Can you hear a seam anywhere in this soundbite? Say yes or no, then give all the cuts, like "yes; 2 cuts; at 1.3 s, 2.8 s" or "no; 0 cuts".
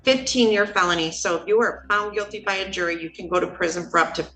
no; 0 cuts